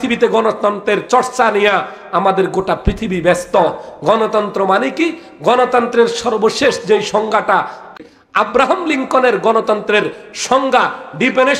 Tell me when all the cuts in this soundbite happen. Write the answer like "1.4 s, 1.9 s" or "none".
8.0 s